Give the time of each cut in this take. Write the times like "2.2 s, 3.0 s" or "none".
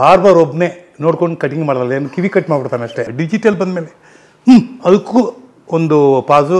3.1 s